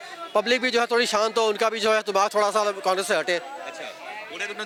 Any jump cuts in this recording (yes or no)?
no